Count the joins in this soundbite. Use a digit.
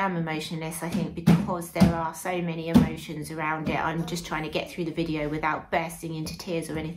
0